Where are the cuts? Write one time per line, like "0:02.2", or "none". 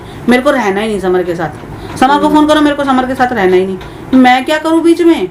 none